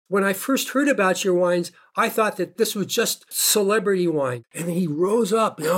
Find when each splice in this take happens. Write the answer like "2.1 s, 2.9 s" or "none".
2.6 s, 4.4 s